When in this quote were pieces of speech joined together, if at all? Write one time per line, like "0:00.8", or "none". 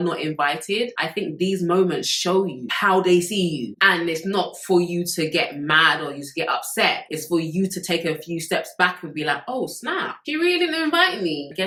none

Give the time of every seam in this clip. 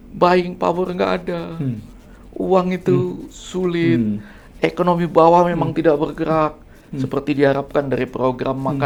none

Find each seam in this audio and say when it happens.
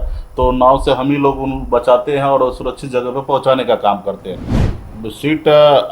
0:04.7

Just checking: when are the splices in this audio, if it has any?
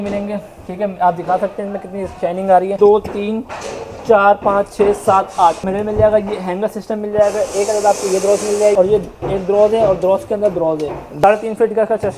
0:02.7
0:05.6
0:08.8
0:11.2

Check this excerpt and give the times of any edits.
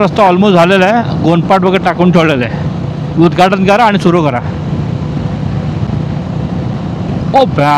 none

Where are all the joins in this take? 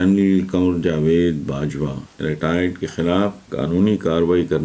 0:02.1
0:03.4

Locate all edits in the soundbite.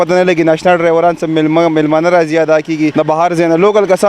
0:02.9

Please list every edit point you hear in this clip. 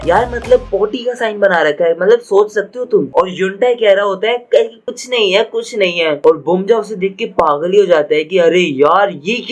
none

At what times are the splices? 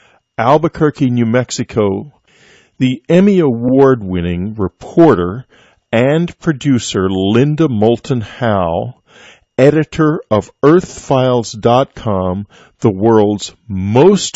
0:09.4

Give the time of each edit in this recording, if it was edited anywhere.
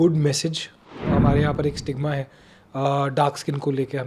0:00.9

